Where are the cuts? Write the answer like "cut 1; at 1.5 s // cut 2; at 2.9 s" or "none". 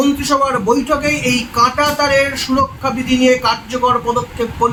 none